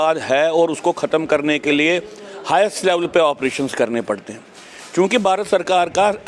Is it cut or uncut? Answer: uncut